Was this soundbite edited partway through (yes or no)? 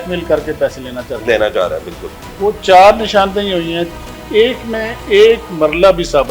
no